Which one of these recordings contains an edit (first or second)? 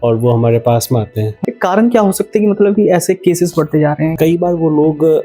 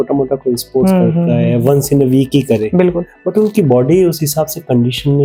first